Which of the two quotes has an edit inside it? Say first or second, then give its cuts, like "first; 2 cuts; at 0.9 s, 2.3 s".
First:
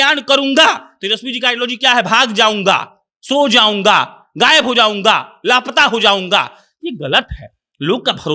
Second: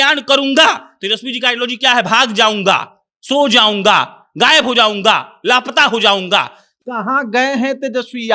second; 1 cut; at 6.8 s